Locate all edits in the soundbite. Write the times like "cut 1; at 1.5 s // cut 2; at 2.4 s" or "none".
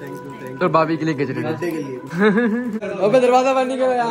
cut 1; at 2.8 s